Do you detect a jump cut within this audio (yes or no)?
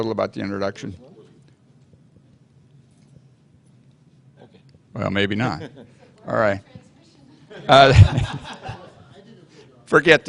no